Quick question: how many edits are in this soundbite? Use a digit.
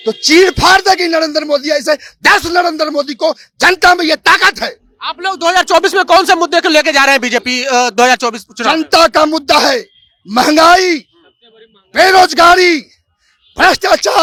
0